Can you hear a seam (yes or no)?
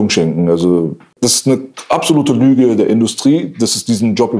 yes